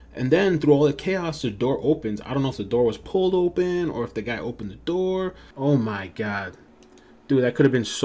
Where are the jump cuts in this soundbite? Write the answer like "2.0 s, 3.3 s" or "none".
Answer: 5.4 s